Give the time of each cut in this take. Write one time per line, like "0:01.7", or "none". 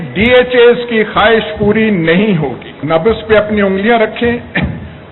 0:02.7